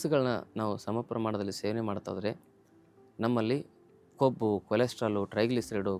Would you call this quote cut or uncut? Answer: uncut